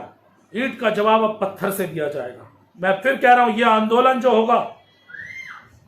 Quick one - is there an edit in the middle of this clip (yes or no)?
yes